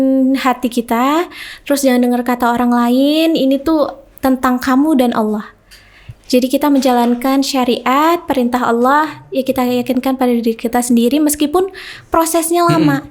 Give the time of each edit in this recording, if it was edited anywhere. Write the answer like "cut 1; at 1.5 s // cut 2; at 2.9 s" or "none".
none